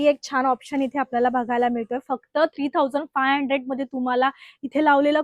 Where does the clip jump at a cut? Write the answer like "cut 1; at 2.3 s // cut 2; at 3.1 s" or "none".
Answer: none